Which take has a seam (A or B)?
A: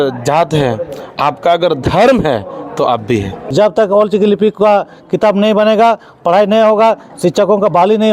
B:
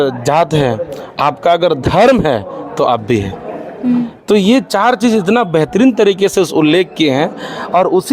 A